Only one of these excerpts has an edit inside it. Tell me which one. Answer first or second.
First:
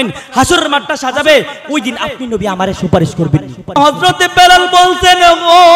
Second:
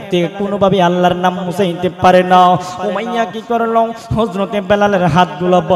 first